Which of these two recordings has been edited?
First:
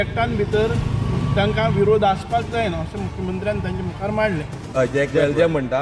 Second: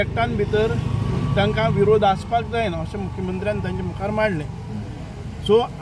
first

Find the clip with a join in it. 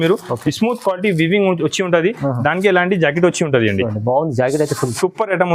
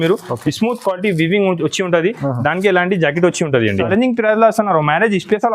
second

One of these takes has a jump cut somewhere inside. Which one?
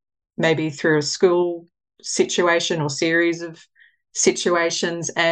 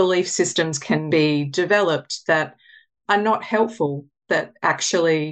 second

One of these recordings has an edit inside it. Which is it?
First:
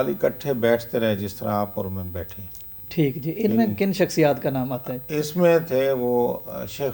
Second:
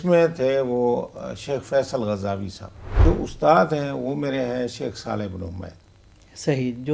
second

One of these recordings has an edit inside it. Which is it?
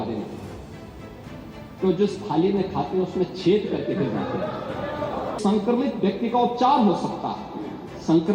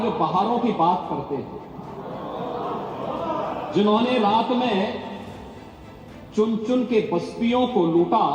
first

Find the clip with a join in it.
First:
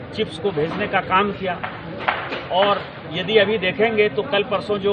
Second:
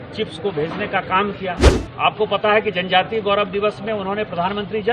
second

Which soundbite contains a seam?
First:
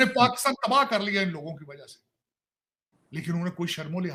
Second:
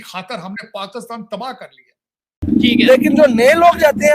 second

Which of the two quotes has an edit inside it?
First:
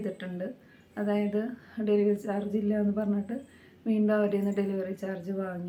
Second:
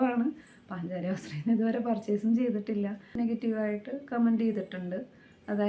second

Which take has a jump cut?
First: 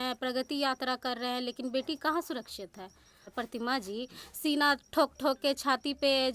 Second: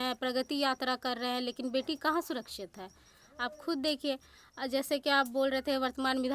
first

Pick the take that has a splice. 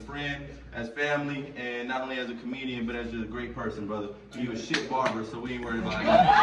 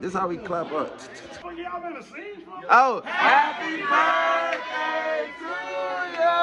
second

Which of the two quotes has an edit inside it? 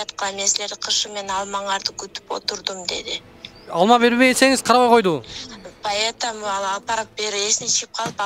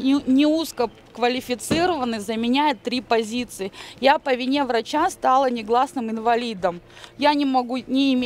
first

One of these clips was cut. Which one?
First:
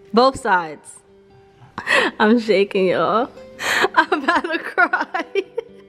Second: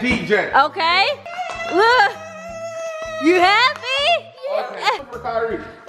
second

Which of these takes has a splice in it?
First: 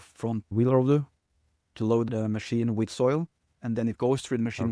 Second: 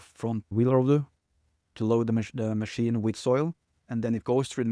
first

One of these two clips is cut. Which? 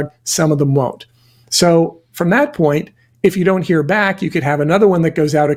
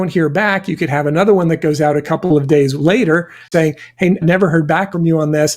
second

